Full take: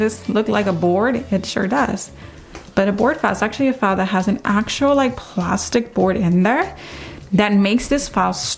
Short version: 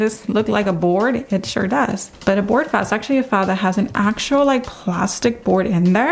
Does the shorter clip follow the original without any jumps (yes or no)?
no